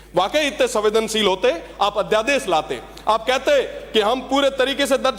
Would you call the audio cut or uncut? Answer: uncut